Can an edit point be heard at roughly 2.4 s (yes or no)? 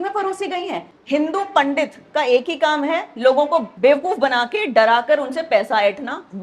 no